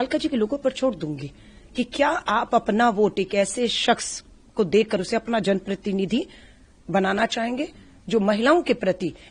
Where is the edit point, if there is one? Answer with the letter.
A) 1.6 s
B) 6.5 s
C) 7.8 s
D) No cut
D